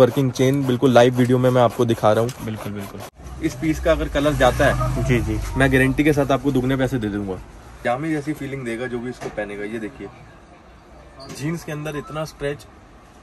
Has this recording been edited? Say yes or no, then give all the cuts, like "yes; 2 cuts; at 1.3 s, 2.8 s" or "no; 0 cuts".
yes; 2 cuts; at 2.9 s, 7.6 s